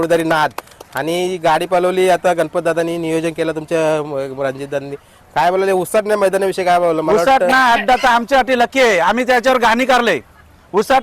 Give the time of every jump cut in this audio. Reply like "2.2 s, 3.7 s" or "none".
none

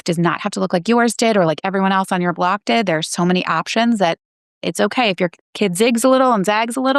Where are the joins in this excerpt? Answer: none

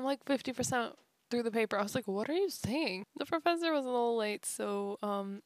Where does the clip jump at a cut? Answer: 3.0 s

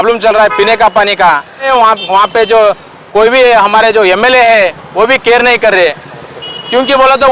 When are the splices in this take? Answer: 1.7 s

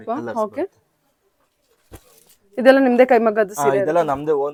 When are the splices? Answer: none

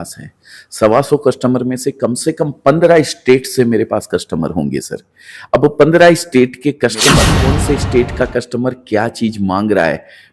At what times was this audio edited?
7.4 s

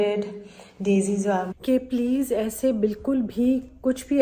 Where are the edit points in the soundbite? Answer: 1.5 s

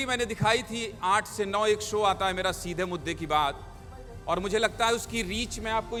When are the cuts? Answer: none

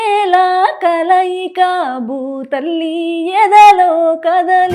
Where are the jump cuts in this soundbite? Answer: none

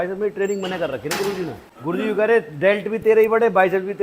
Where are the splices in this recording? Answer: 1.7 s

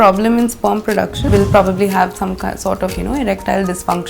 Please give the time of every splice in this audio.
1.2 s

